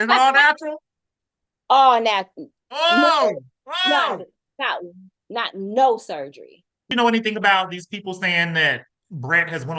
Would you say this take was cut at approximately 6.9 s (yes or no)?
yes